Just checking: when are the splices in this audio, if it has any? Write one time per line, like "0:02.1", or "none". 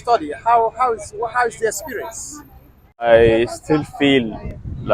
0:03.0